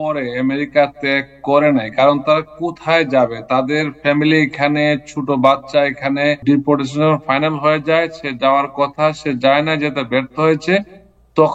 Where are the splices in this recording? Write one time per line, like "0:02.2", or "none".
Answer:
0:06.4